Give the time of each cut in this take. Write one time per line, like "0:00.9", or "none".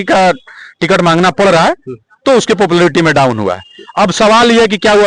none